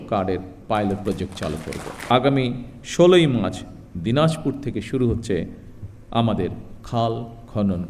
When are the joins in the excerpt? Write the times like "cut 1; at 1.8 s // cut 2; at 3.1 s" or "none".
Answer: cut 1; at 1.9 s